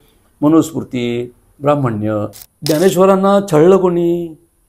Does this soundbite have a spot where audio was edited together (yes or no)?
yes